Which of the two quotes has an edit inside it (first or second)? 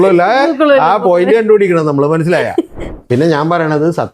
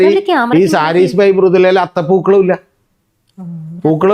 first